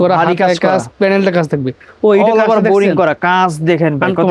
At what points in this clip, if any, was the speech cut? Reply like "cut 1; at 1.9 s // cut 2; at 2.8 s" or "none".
none